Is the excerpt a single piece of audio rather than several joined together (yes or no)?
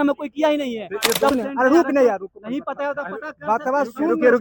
no